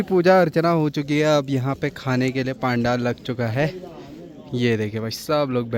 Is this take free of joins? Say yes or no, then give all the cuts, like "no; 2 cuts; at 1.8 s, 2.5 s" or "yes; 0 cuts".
yes; 0 cuts